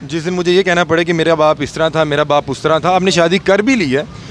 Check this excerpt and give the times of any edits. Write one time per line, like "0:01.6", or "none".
none